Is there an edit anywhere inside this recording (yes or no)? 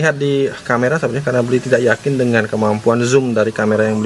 no